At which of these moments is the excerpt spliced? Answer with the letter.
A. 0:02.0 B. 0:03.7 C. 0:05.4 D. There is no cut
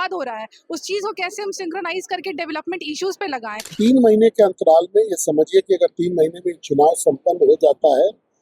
B